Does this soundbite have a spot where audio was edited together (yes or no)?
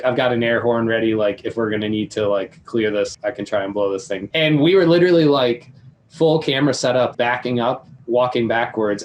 yes